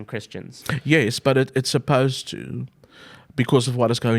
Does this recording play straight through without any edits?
yes; 0 cuts

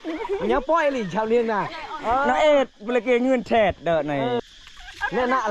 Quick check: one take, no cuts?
no; 1 cut; at 4.4 s

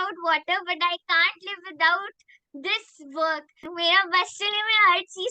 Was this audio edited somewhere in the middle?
yes; 1 cut; at 3.7 s

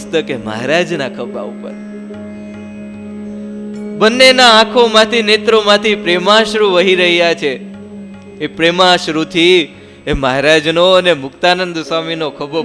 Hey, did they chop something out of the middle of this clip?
no; 0 cuts

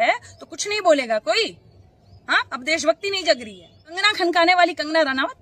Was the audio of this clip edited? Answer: yes; 1 cut; at 4.0 s

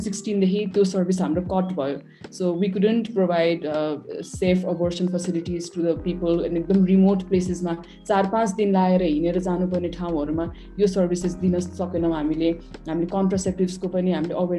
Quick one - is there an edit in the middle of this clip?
no; 0 cuts

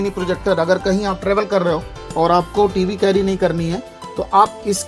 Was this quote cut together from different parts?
no; 0 cuts

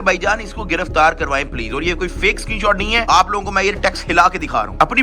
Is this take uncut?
yes; 0 cuts

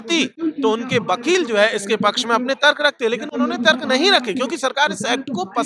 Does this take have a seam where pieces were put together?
no; 0 cuts

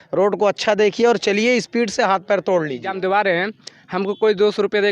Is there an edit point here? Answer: yes; 1 cut; at 2.9 s

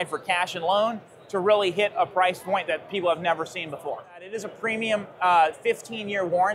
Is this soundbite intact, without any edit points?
no; 1 cut; at 4.4 s

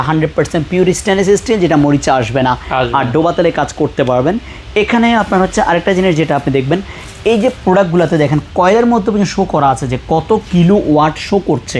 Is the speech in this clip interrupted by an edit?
no; 0 cuts

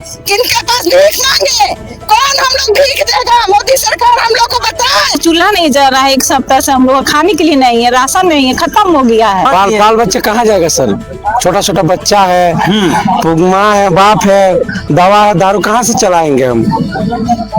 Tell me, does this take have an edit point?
yes; 2 cuts; at 5.2 s, 9.5 s

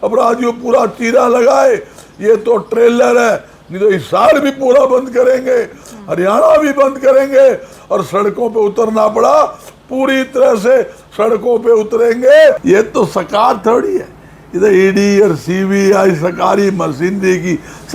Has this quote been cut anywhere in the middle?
yes; 1 cut; at 12.6 s

